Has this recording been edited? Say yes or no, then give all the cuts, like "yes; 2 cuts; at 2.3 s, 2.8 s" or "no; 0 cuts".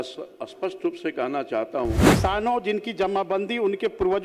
yes; 1 cut; at 2.0 s